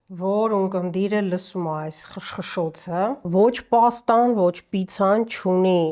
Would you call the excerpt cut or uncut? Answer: cut